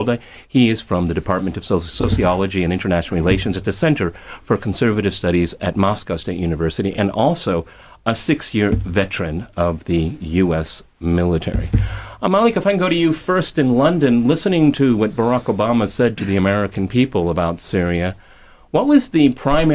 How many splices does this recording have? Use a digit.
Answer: 1